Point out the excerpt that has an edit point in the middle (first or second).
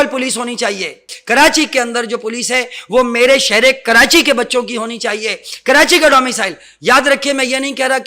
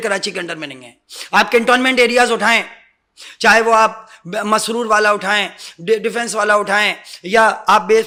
first